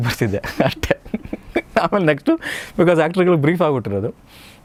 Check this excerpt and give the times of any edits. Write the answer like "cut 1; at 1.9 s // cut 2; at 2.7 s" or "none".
none